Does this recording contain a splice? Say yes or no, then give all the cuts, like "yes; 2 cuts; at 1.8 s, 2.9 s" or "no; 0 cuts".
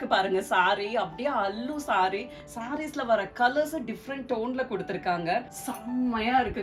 yes; 1 cut; at 5.6 s